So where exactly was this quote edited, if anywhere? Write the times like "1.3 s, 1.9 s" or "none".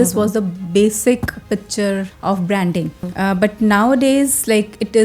2.1 s, 3.1 s